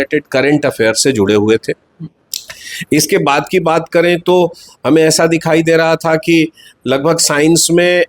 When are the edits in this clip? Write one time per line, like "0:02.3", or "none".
none